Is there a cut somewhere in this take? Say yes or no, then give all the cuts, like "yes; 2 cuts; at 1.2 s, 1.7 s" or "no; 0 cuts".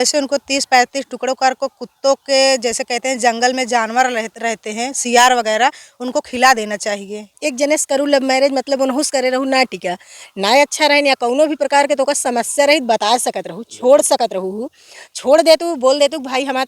yes; 1 cut; at 7.3 s